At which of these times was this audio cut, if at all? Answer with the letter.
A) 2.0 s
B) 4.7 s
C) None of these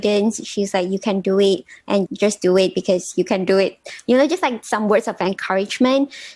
A